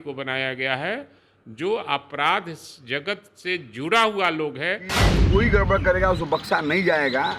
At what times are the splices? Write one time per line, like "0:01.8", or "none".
0:05.1